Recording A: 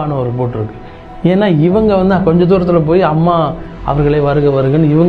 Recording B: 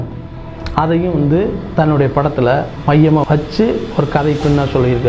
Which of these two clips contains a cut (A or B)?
B